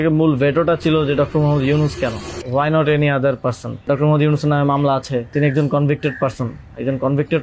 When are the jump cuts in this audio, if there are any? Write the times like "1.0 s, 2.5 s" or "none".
2.3 s, 3.8 s, 5.3 s